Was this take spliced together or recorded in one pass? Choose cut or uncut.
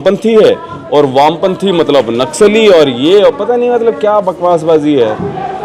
uncut